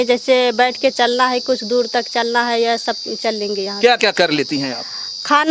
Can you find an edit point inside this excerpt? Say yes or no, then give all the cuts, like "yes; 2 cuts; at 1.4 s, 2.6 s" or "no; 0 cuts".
no; 0 cuts